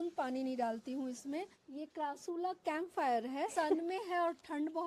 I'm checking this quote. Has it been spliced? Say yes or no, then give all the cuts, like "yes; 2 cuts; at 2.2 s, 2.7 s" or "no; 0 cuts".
yes; 2 cuts; at 1.6 s, 3.5 s